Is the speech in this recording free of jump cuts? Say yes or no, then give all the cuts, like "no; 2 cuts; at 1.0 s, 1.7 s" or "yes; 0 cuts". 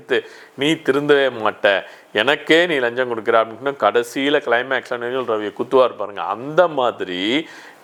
yes; 0 cuts